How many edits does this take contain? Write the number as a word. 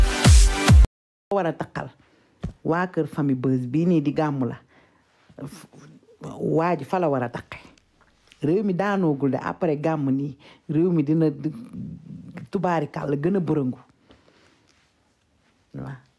one